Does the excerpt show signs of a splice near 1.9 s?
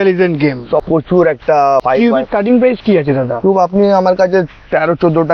no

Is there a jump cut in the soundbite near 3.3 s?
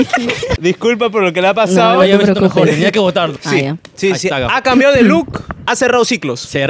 yes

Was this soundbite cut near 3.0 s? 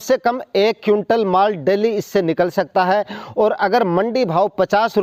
no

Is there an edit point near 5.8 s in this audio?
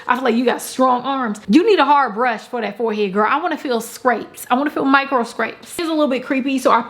yes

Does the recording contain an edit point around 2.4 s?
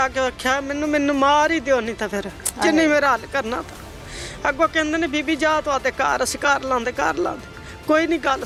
no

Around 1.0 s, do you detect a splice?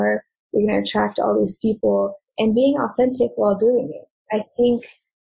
no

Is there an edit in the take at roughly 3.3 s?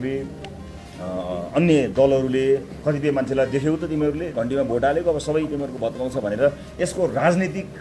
no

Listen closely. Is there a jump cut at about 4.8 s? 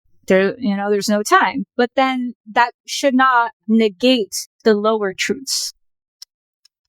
no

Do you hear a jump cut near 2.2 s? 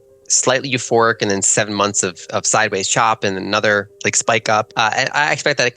no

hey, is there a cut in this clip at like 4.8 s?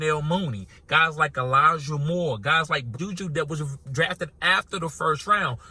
no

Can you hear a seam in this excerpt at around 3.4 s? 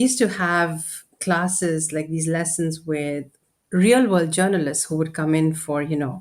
yes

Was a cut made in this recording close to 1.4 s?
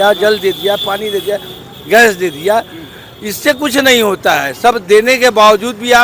no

